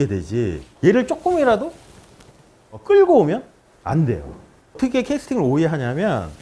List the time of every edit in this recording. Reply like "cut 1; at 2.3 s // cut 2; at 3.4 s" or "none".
cut 1; at 4.8 s